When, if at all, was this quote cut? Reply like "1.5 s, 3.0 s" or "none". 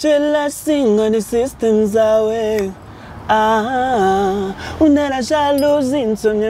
none